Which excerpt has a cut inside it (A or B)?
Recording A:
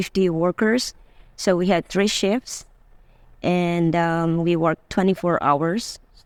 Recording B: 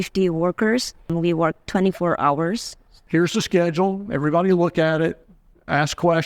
B